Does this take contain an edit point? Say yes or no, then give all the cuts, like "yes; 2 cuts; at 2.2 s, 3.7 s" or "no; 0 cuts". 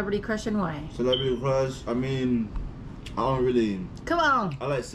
no; 0 cuts